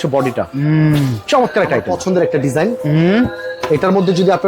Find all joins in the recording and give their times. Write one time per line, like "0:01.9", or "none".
0:01.9